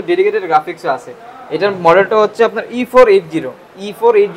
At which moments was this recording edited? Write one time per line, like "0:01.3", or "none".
none